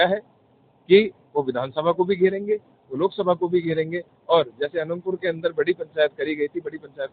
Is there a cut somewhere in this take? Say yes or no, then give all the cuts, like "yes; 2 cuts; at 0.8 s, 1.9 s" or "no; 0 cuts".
no; 0 cuts